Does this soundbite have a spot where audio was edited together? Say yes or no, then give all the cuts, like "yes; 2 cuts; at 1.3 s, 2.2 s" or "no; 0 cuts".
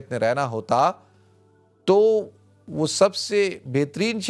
no; 0 cuts